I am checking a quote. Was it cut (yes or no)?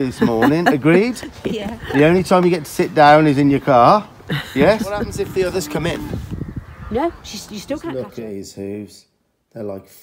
yes